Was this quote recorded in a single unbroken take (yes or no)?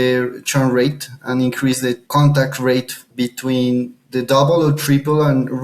no